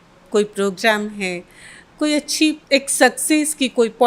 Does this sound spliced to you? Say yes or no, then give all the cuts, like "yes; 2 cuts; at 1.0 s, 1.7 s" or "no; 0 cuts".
yes; 1 cut; at 2.6 s